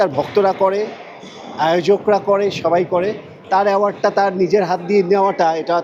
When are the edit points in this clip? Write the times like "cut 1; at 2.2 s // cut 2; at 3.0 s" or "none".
none